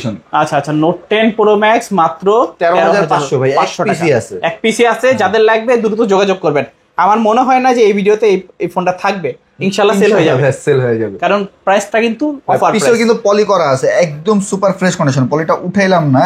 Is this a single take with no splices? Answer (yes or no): yes